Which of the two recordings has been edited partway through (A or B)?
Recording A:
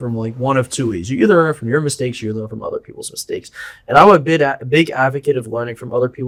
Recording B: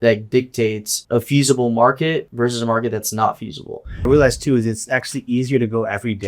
B